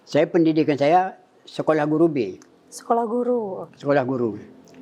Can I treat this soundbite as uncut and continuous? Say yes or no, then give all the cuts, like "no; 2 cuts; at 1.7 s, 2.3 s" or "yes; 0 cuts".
yes; 0 cuts